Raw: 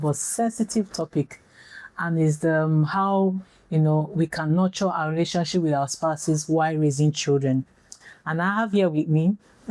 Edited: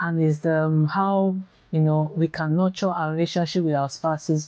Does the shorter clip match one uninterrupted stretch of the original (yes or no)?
yes